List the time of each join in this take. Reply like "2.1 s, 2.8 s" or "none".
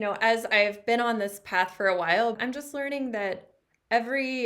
2.4 s

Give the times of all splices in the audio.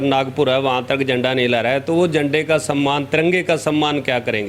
none

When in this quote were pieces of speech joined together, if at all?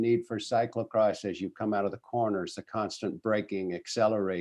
none

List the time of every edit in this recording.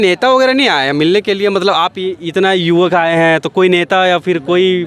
none

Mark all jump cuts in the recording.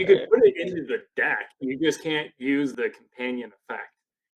2.7 s

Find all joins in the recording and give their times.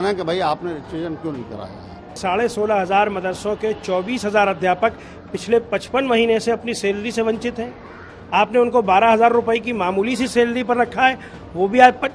2.2 s

